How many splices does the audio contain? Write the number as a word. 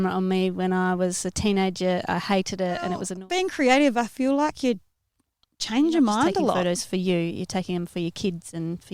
two